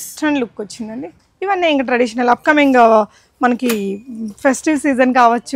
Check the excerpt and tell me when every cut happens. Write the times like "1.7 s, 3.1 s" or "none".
1.2 s